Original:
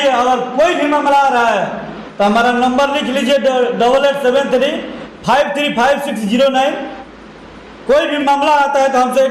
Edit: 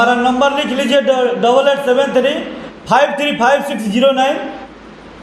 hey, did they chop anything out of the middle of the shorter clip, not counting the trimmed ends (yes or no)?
no